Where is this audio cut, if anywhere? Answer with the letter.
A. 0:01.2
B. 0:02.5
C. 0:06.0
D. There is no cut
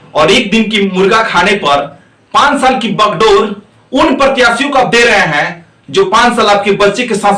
D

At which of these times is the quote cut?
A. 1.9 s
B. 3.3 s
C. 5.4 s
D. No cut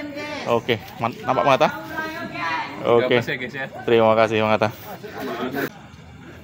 C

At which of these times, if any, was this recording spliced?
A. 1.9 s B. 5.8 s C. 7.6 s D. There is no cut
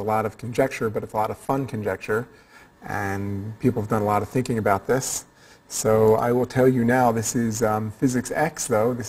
A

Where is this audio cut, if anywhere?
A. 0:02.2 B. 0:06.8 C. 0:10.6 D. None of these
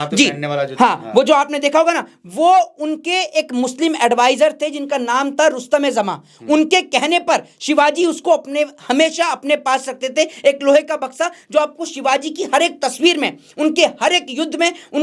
D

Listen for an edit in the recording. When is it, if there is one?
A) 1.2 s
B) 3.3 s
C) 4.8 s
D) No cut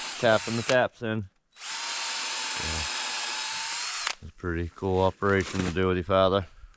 D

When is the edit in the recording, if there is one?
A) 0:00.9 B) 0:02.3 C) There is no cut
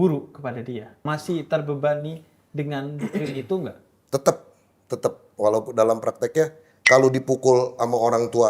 A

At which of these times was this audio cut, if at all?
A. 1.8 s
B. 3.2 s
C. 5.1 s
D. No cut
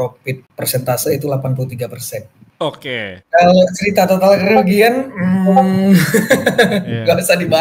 B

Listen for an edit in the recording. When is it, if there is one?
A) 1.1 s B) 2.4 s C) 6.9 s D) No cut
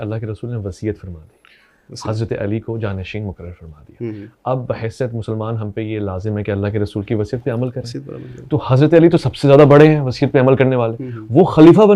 D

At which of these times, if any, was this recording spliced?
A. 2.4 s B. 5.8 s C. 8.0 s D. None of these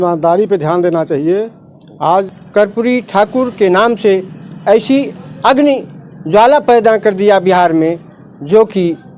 A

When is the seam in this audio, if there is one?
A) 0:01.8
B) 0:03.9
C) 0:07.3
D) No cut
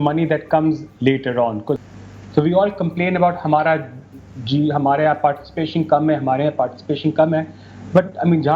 A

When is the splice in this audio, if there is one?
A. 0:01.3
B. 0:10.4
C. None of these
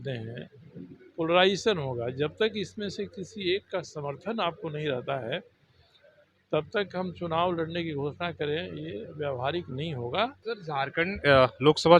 B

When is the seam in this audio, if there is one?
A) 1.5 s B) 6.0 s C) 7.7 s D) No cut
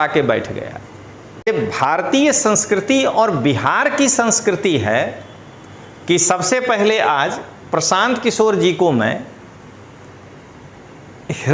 A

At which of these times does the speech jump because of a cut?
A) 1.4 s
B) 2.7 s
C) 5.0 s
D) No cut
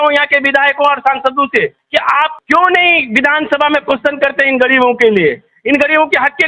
D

